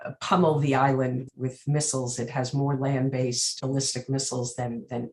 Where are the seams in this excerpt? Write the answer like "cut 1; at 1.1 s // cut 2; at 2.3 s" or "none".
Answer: cut 1; at 1.2 s // cut 2; at 3.6 s

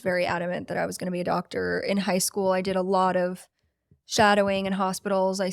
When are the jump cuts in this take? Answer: none

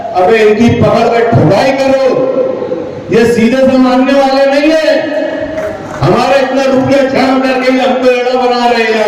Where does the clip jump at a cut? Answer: none

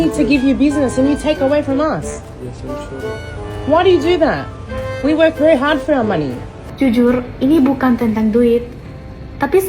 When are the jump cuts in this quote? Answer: cut 1; at 6.6 s

